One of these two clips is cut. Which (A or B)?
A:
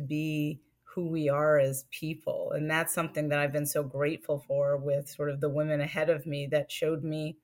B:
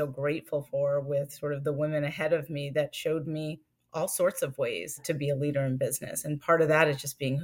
B